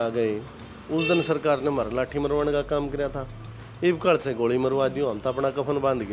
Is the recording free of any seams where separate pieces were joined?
yes; 0 cuts

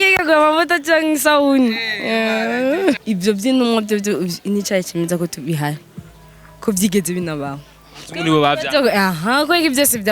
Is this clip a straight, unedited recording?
no; 1 cut; at 3.0 s

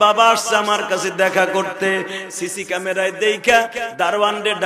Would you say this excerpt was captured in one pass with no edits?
yes; 0 cuts

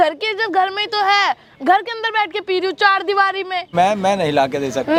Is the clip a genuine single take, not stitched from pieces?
yes; 0 cuts

